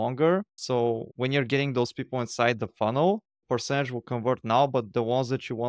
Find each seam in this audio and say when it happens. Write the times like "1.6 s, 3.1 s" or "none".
1.1 s